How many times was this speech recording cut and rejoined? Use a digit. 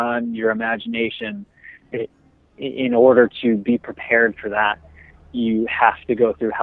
1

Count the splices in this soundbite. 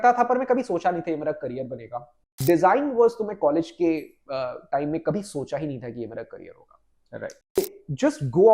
2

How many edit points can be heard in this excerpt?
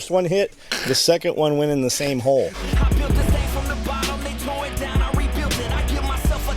1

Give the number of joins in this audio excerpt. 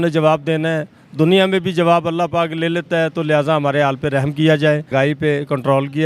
1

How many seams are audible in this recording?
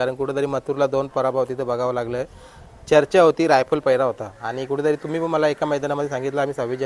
0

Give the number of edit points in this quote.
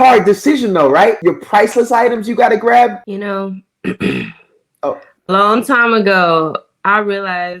2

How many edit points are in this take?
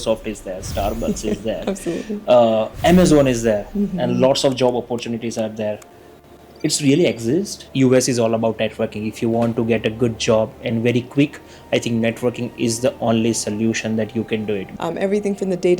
2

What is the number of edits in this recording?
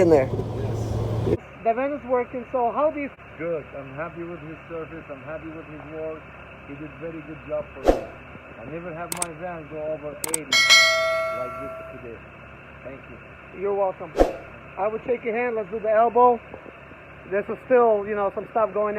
2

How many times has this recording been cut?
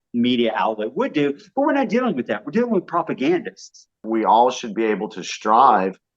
1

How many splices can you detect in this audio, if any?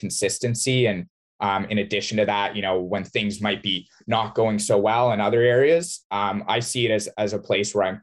0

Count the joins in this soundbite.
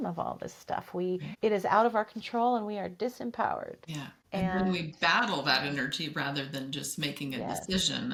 0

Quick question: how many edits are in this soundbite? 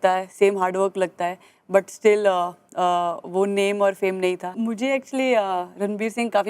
1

